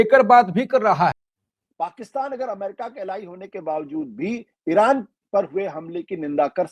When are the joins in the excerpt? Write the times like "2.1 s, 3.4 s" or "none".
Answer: 1.2 s